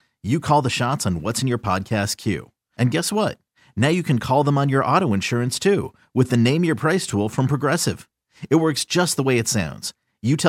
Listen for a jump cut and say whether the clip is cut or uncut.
uncut